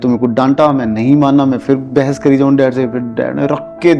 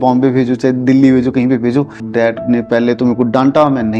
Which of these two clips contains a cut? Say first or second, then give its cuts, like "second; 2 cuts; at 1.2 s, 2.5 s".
second; 1 cut; at 2.0 s